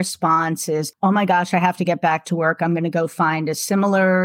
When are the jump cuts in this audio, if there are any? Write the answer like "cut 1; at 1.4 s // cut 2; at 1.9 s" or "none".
cut 1; at 0.9 s